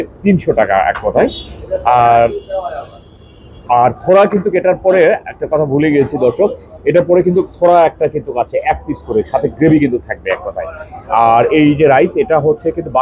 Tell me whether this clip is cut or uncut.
uncut